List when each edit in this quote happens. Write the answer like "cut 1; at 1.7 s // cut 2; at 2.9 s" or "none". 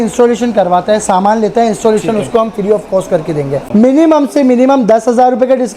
cut 1; at 3.6 s